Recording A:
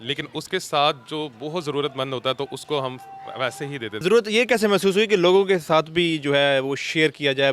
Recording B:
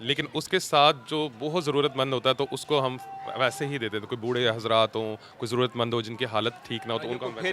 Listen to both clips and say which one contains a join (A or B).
A